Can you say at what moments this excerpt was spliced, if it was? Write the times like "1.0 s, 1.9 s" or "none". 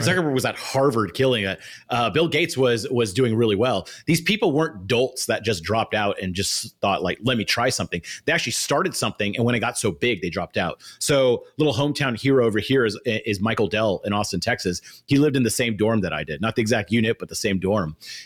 none